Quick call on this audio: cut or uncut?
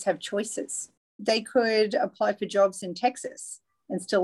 uncut